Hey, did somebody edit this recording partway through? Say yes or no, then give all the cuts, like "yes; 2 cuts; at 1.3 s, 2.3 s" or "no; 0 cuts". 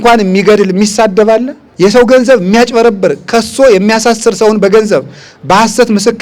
yes; 1 cut; at 1.6 s